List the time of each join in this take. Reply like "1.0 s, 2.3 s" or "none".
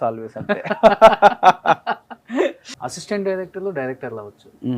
2.7 s